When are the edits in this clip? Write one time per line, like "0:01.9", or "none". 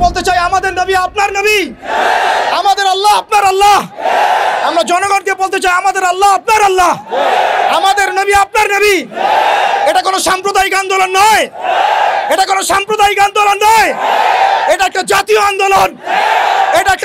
none